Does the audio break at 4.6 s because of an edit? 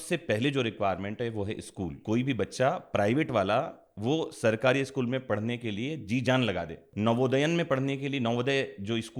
no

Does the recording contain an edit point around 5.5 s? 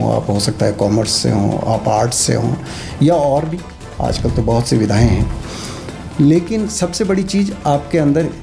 no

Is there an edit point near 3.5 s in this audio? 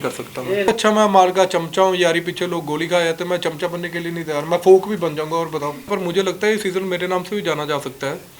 no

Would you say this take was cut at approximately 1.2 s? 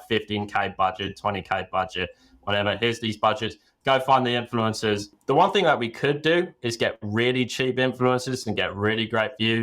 no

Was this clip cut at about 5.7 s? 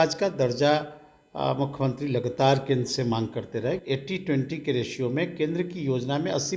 no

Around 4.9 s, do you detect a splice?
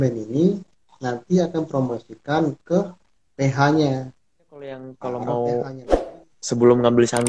yes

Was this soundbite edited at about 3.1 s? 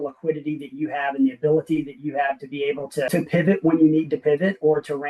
yes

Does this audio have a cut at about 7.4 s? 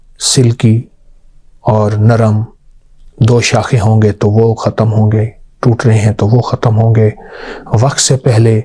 no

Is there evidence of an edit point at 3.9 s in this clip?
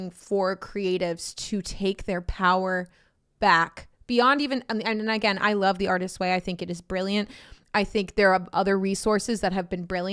no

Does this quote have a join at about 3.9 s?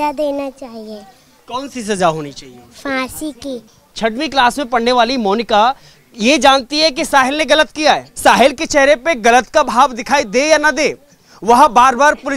yes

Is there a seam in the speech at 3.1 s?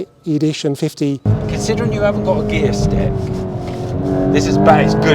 no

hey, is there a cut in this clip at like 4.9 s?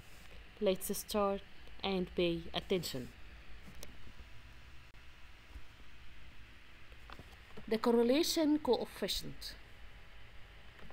yes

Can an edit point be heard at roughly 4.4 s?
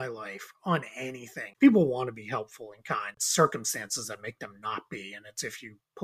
no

